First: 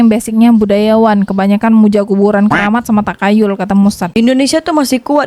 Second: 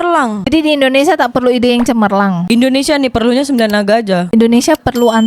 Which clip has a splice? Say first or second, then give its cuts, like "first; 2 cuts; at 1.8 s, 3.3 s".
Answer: second; 1 cut; at 4.3 s